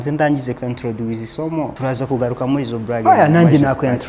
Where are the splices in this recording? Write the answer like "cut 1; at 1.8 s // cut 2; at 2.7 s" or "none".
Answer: cut 1; at 1.7 s // cut 2; at 3.0 s